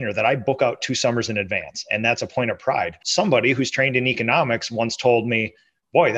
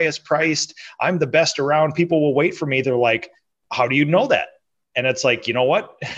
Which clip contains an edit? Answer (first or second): first